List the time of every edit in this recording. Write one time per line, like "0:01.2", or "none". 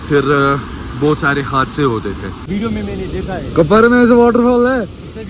0:02.5